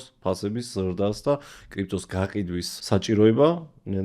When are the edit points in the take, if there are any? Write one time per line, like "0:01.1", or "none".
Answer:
0:02.7